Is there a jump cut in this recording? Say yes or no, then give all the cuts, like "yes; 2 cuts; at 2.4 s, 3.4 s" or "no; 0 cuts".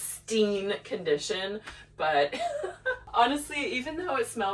yes; 1 cut; at 3.0 s